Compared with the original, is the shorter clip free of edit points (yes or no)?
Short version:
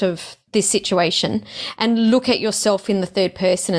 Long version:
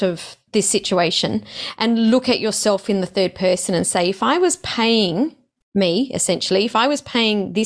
yes